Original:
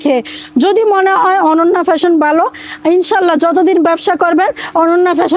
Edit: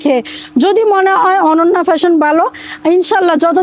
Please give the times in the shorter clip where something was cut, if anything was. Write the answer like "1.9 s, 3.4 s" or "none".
none

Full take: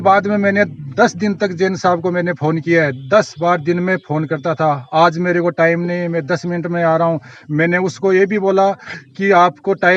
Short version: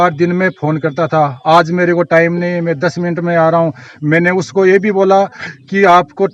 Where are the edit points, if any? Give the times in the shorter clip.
none

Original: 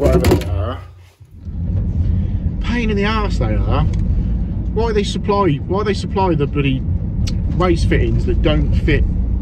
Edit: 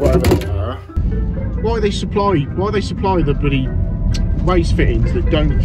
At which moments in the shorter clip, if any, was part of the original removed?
1.0 s

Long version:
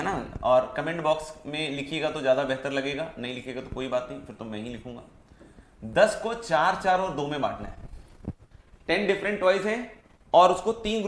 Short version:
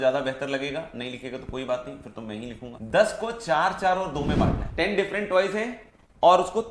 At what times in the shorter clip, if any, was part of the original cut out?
2.7 s, 4.6 s

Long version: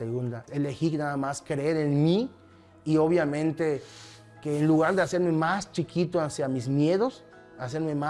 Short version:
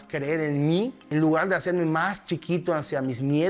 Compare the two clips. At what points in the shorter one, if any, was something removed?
1.1 s

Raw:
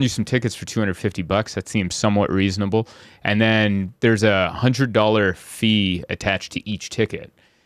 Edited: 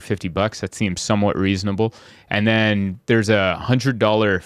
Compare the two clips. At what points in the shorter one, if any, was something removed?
none

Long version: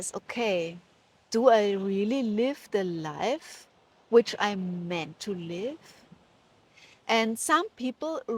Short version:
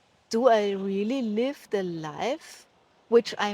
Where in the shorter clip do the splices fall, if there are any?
none

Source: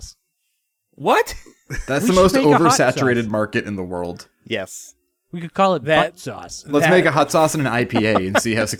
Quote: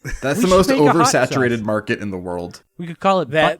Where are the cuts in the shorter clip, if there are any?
2.6 s

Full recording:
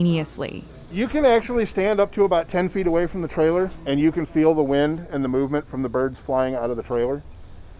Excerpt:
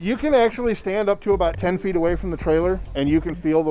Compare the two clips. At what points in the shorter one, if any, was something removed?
none

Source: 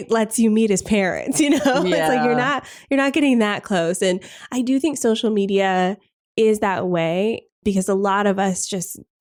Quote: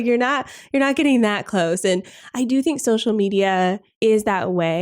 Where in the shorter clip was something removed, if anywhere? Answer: 3.9 s

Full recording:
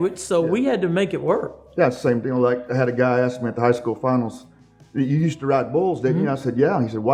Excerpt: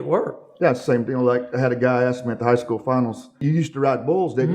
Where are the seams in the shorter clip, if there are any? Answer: 3.4 s

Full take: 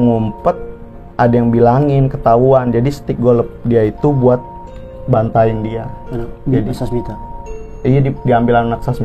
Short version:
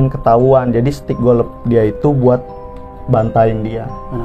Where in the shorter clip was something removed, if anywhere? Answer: none

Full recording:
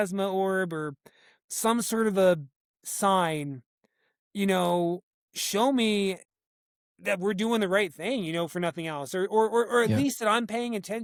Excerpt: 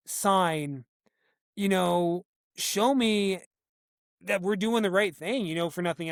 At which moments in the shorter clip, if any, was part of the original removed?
none

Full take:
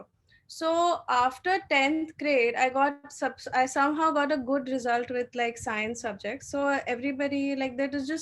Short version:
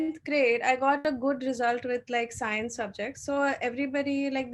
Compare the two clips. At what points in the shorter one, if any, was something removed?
1.0 s

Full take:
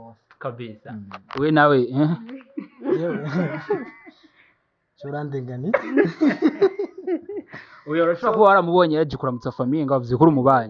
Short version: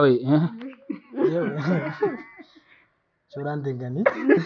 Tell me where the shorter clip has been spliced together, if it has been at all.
none

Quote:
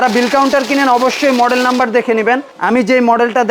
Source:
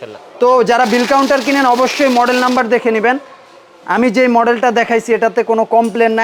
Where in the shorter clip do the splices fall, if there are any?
2.5 s

